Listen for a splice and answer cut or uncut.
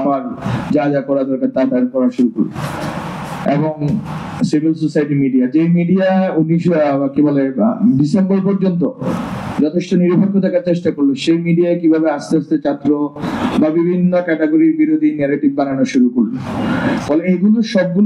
uncut